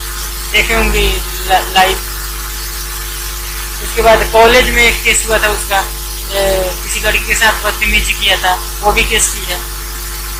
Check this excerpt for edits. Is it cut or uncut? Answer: uncut